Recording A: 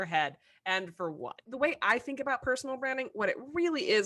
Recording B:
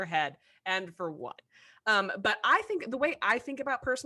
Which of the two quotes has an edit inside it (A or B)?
A